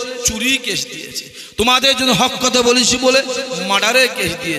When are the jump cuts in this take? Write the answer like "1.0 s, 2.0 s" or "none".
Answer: none